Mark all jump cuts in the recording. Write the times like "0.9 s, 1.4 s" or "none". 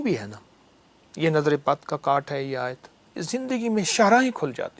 3.2 s

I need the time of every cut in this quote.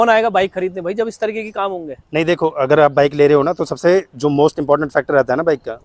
none

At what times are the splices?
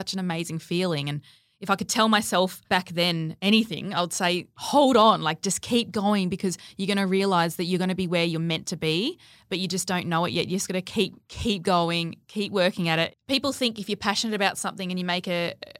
2.8 s, 4.5 s, 13.2 s

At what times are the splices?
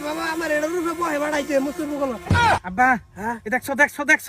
2.6 s

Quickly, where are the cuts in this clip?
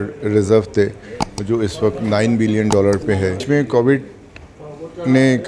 3.5 s

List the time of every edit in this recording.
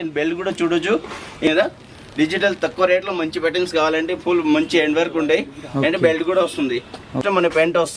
1.5 s, 7.2 s

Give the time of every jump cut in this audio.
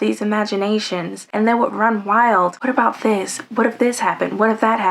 2.6 s

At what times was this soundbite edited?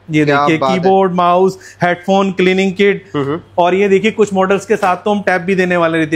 none

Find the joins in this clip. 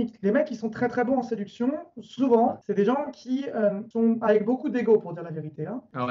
none

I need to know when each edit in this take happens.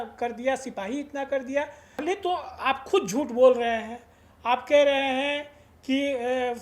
2.0 s

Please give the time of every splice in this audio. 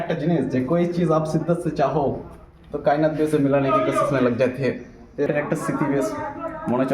5.3 s

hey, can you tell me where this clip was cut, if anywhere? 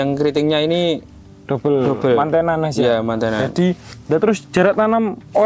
none

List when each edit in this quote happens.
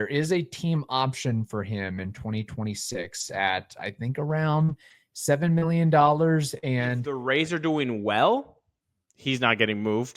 7.1 s

